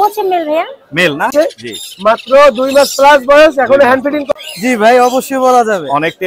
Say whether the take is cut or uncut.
cut